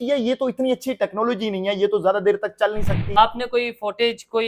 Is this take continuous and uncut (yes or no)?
no